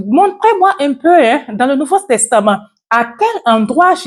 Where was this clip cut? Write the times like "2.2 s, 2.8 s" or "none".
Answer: none